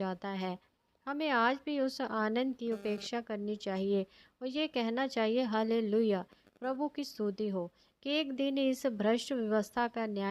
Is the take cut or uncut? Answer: uncut